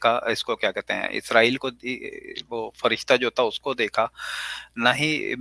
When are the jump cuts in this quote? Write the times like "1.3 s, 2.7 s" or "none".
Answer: none